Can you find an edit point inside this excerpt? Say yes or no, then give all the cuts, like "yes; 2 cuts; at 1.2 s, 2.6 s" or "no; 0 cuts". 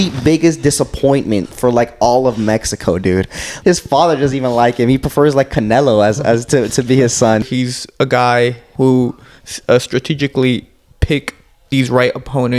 yes; 4 cuts; at 3.4 s, 7.4 s, 8.6 s, 11.0 s